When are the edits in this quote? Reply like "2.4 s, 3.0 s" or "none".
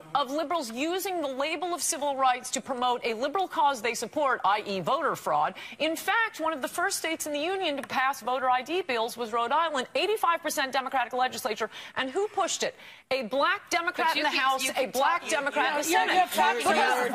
none